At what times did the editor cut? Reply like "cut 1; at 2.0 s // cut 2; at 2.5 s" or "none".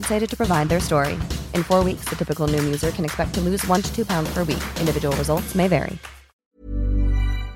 cut 1; at 6.4 s